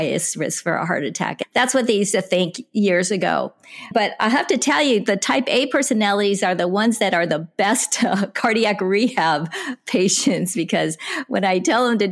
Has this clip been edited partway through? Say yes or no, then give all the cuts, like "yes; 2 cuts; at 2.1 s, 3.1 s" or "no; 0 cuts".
yes; 2 cuts; at 1.3 s, 3.9 s